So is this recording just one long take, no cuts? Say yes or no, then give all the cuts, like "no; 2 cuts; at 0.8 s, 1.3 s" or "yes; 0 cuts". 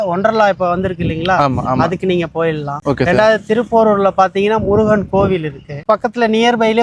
yes; 0 cuts